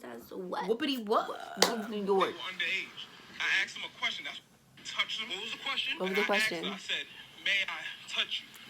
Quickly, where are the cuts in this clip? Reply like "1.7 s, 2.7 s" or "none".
1.9 s